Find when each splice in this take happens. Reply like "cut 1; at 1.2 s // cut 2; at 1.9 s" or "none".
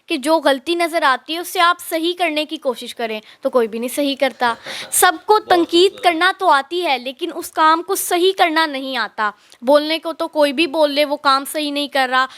none